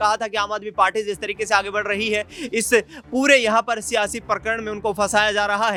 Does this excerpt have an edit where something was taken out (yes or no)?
no